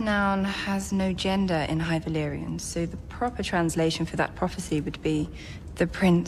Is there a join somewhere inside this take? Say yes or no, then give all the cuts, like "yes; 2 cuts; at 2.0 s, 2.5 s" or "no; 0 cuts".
yes; 1 cut; at 2.6 s